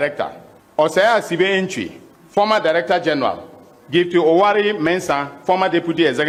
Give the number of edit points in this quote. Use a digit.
0